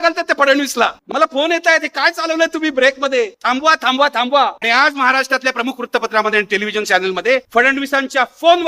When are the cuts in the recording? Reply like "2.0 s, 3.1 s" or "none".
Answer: 1.0 s, 4.6 s